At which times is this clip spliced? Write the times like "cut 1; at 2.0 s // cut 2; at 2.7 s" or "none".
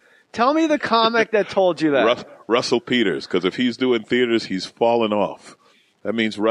none

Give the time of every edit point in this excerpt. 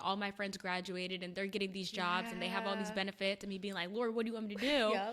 none

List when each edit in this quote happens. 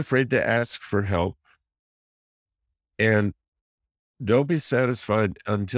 none

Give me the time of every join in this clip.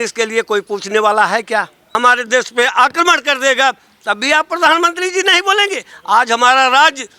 cut 1; at 1.8 s

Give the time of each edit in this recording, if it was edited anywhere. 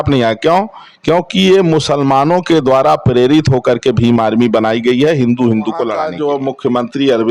cut 1; at 6.1 s

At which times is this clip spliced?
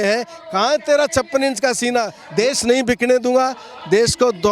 cut 1; at 2.2 s

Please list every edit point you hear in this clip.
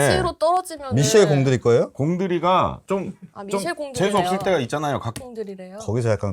cut 1; at 5.2 s

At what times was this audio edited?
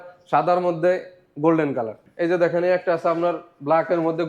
cut 1; at 2.0 s

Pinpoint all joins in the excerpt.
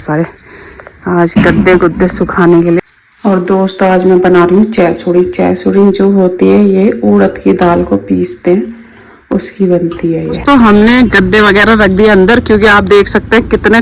cut 1; at 2.8 s // cut 2; at 10.4 s

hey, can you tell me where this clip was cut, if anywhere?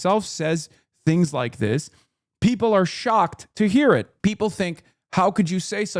cut 1; at 4.1 s

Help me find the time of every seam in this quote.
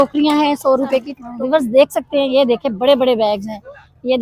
cut 1; at 1.2 s

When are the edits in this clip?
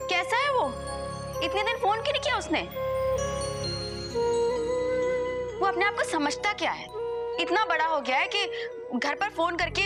none

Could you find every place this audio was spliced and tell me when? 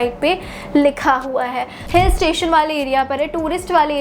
cut 1; at 1.8 s

